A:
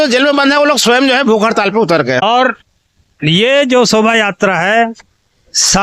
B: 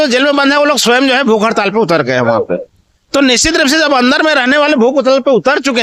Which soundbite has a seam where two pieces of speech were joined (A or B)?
A